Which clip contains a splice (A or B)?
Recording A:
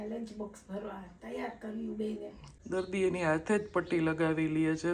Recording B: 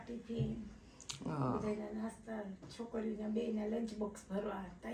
A